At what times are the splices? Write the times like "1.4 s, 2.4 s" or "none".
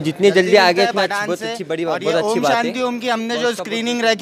2.4 s

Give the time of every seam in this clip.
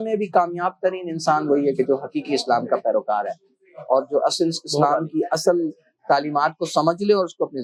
none

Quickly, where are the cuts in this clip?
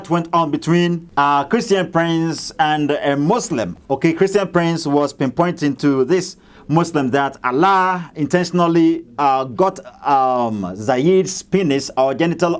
1.0 s, 3.7 s

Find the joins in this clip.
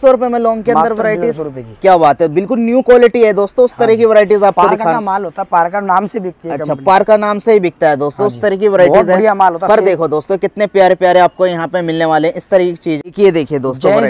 none

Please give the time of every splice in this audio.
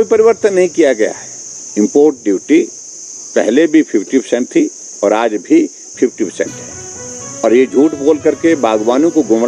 1.6 s

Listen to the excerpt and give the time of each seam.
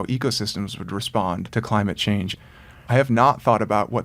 1.5 s, 2.3 s

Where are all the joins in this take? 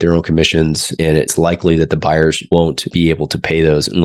1.2 s, 2.7 s

